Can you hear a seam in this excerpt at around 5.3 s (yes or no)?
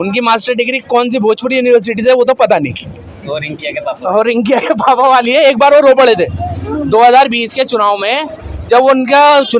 no